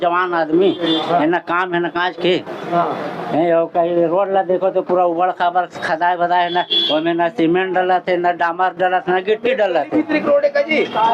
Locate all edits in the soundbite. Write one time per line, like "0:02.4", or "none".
none